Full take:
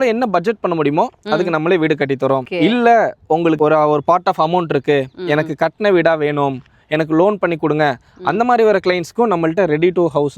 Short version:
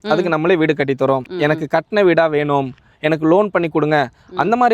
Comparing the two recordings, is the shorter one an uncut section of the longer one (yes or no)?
no